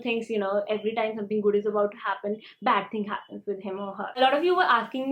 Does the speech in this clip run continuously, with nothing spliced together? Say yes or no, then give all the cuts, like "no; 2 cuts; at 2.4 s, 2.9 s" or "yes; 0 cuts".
no; 1 cut; at 4.2 s